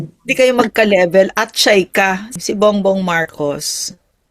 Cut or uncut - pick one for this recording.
cut